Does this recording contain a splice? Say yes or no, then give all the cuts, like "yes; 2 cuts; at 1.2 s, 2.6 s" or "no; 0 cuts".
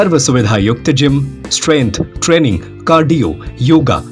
no; 0 cuts